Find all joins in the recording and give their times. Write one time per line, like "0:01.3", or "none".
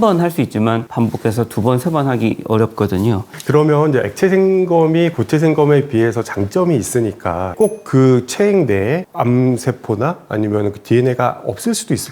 0:03.3
0:07.5